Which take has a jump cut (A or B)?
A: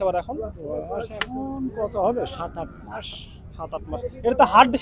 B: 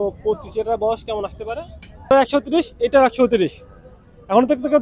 B